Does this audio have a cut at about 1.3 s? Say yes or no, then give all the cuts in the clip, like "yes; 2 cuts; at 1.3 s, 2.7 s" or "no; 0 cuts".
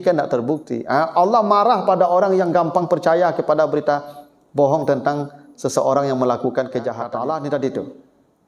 no; 1 cut; at 7.0 s